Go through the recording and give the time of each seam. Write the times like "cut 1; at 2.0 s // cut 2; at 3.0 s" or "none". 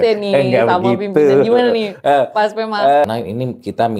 cut 1; at 3.0 s